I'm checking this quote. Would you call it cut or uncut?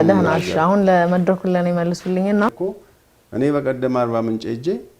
cut